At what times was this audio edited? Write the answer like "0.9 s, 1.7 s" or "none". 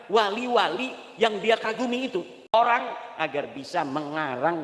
2.5 s